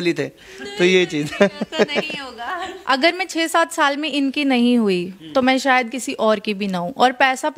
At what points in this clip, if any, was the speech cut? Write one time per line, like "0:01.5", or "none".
0:02.7

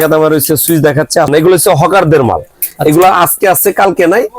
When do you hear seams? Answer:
0:01.3

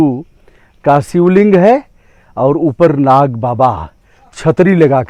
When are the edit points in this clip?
none

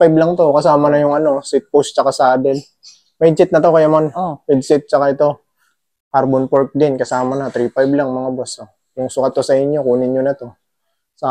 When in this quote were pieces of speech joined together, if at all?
none

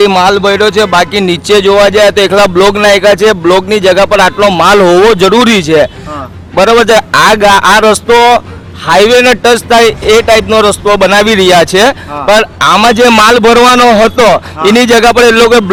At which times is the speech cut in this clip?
none

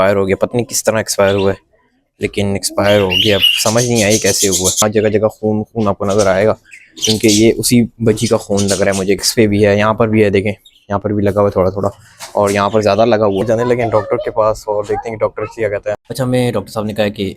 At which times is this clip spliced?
0:04.8
0:09.3
0:13.4
0:16.0

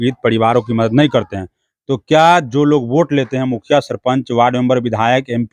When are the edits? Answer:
none

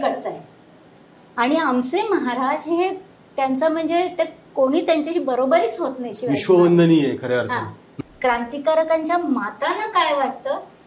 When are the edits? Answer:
0:07.9

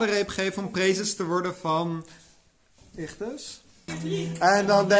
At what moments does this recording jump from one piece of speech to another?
0:04.0

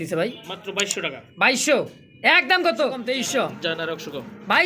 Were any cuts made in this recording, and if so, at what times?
0:03.0

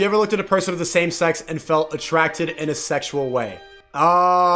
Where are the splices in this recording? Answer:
none

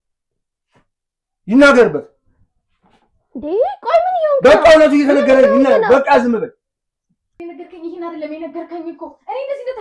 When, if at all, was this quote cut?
0:07.4

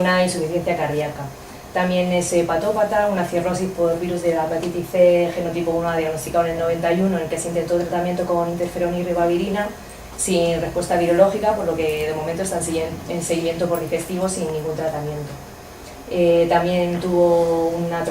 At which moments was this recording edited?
0:13.2

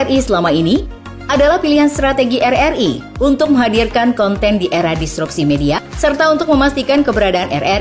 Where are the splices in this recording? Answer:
0:05.9

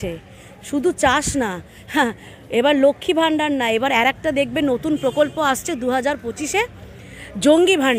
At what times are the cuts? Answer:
none

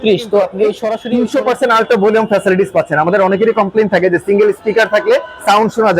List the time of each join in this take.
0:00.9

